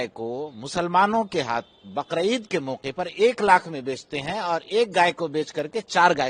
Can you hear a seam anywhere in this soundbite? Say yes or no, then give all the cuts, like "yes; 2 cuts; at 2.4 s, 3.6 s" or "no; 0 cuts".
no; 0 cuts